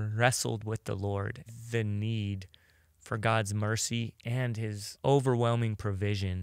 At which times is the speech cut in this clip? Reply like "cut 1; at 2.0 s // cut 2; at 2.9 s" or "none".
cut 1; at 1.4 s // cut 2; at 4.9 s